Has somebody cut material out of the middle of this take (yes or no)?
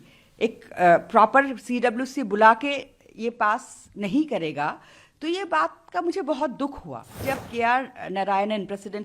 yes